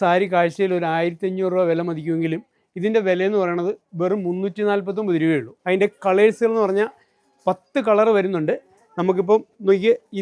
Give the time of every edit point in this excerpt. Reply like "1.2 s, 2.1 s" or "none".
none